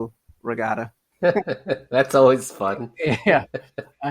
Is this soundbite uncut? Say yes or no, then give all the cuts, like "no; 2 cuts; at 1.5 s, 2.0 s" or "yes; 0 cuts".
no; 1 cut; at 1.0 s